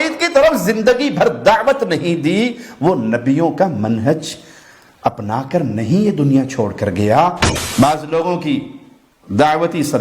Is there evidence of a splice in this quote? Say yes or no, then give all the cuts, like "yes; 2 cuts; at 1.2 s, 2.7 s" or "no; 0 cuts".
yes; 1 cut; at 7.5 s